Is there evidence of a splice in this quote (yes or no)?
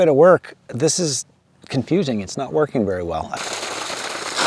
yes